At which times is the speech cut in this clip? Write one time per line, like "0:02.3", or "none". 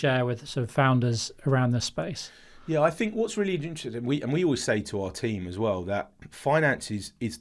none

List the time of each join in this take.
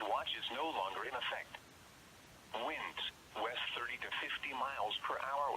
0:04.2

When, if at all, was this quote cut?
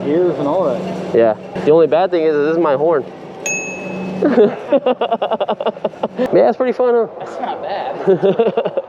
0:01.5
0:06.3

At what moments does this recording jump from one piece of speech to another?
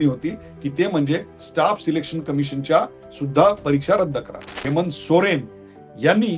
0:04.6

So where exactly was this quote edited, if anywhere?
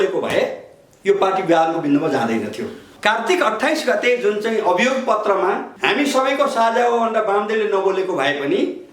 0:02.9
0:05.7

